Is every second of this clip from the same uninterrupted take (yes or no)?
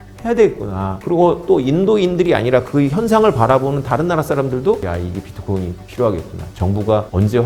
no